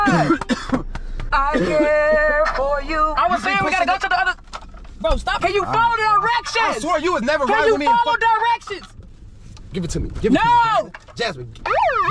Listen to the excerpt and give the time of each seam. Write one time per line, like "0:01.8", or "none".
0:03.1
0:05.4